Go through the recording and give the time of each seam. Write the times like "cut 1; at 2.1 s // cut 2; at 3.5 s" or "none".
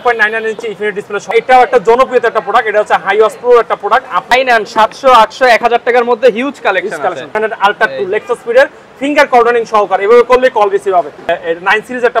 cut 1; at 1.3 s // cut 2; at 4.3 s // cut 3; at 7.3 s // cut 4; at 11.3 s